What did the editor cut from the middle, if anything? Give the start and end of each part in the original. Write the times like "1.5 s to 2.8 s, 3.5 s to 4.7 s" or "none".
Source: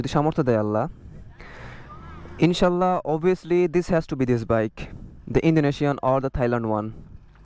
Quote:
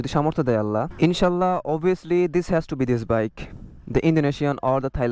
0.9 s to 2.3 s